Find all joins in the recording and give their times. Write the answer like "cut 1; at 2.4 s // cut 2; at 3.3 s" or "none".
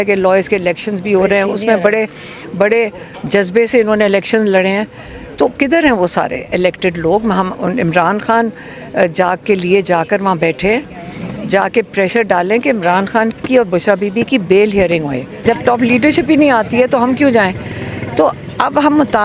cut 1; at 15.3 s